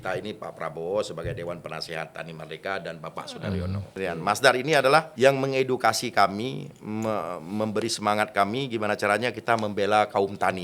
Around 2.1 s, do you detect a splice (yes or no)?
no